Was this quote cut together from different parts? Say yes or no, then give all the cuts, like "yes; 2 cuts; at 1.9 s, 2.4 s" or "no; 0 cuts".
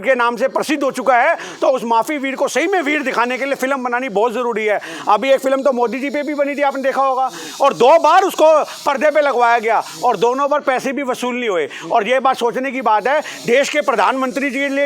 no; 0 cuts